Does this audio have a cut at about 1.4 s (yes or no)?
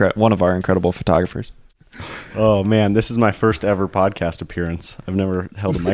yes